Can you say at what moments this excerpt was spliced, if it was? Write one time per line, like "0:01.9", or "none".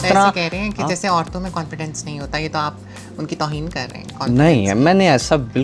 none

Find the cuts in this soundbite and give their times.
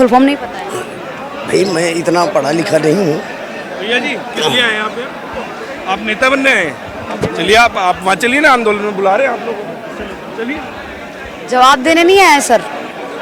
none

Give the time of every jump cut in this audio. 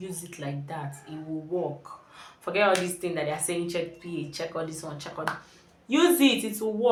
none

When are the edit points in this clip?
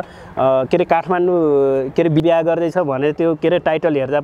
0:02.2

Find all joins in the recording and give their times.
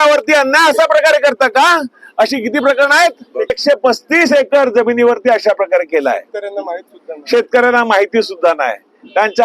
0:03.5

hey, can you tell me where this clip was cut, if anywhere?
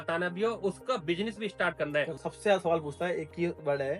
0:02.2

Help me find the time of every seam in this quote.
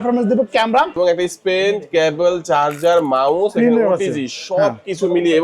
0:01.0

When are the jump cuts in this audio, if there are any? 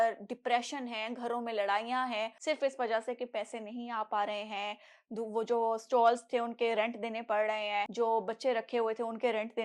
0:02.3
0:07.9

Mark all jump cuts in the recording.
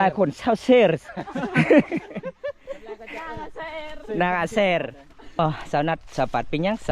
0:05.4

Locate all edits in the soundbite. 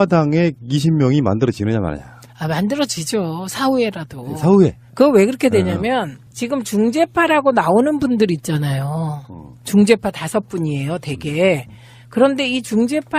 0:03.3

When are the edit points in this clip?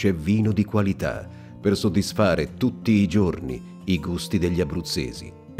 none

